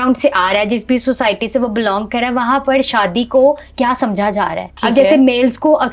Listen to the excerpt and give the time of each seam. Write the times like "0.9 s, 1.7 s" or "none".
4.7 s